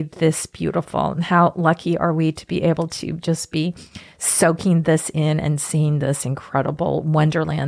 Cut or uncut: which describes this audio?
uncut